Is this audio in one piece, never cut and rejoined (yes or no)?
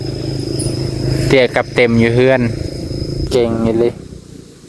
no